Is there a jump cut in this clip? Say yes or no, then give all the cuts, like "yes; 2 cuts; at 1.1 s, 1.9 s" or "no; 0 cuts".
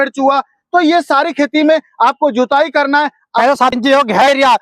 yes; 1 cut; at 3.4 s